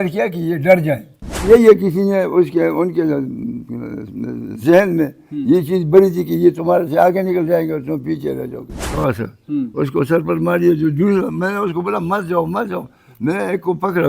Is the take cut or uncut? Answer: cut